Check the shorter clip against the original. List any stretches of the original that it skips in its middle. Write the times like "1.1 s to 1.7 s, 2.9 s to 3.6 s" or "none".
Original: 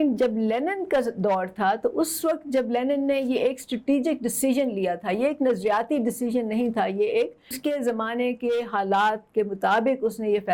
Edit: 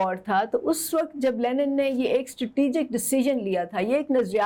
none